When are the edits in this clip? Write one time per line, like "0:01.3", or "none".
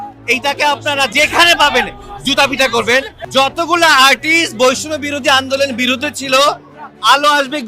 0:01.1
0:03.1